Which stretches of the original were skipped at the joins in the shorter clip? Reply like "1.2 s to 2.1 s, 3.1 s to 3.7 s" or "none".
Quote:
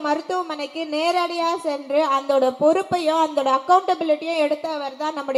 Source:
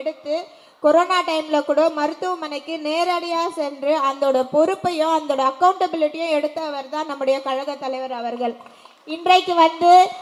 none